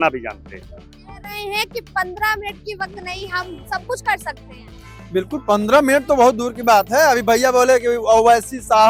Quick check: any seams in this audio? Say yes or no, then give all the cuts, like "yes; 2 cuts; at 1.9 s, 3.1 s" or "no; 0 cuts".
no; 0 cuts